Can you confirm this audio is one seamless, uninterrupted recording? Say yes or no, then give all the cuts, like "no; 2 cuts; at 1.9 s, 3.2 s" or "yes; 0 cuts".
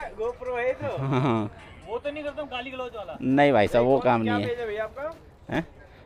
yes; 0 cuts